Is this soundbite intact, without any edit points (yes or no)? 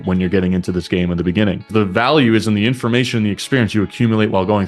no